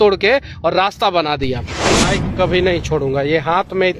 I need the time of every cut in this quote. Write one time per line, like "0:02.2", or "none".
0:01.9